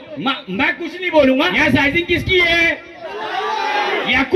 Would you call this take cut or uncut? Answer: cut